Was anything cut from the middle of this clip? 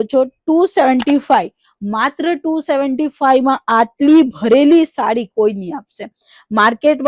no; 0 cuts

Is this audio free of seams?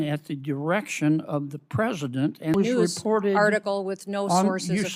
no; 1 cut; at 2.5 s

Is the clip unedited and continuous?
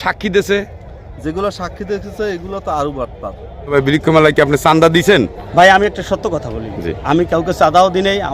no; 1 cut; at 3.7 s

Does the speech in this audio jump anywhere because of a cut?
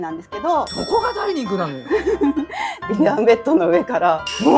yes; 1 cut; at 2.8 s

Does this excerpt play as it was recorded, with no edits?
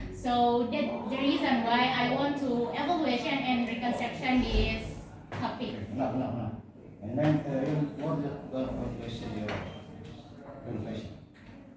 yes; 0 cuts

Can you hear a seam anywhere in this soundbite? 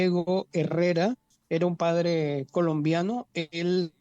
yes; 1 cut; at 1.3 s

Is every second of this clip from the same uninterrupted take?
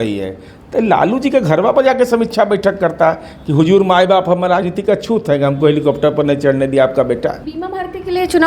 no; 1 cut; at 7.5 s

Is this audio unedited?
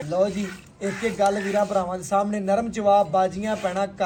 yes; 0 cuts

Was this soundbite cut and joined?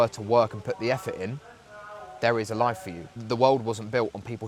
no; 0 cuts

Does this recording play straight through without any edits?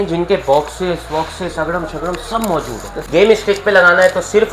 no; 1 cut; at 3.0 s

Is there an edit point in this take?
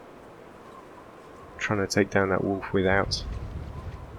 yes; 1 cut; at 3.1 s

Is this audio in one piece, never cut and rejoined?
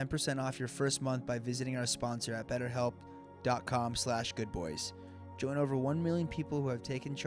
yes; 0 cuts

